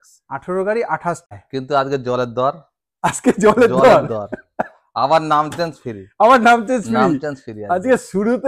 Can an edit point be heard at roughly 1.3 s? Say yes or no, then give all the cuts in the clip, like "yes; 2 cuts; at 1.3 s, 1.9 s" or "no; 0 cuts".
yes; 1 cut; at 1.3 s